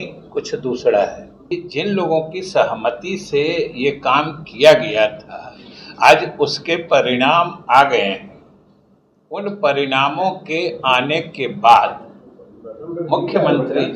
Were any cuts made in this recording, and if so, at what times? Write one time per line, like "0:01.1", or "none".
0:01.5